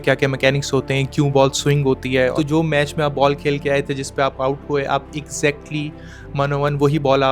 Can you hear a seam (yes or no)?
yes